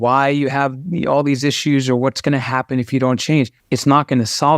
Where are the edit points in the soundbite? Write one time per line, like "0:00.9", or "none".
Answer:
0:03.6